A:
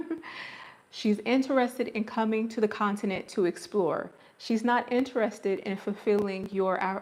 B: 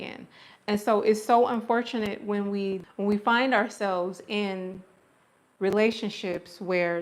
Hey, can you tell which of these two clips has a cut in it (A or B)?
B